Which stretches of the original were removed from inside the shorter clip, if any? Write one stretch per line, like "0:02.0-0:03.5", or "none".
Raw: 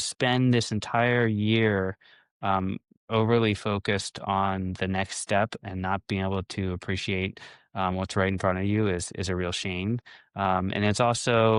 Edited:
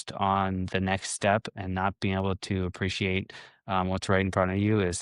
none